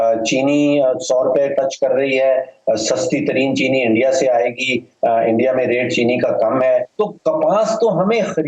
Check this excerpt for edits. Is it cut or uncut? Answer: cut